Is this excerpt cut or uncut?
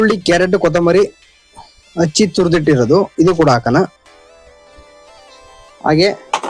cut